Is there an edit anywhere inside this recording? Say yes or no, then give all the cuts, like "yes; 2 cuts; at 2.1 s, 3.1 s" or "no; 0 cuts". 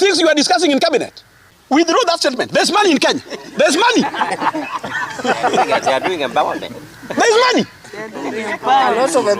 yes; 1 cut; at 1.8 s